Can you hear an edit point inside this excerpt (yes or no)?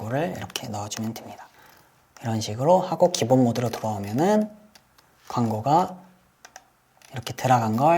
no